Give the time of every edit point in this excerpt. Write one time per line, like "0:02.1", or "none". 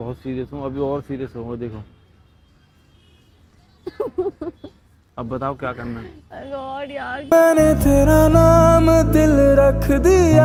none